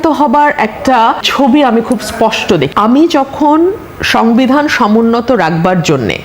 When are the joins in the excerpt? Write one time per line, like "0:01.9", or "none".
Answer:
0:01.2
0:02.7